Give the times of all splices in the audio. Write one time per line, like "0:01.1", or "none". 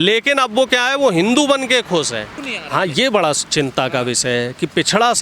0:02.4